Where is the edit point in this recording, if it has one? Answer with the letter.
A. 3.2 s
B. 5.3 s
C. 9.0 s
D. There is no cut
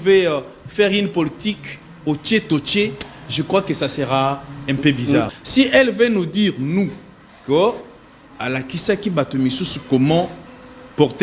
B